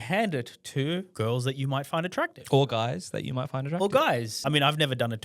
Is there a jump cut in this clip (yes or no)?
yes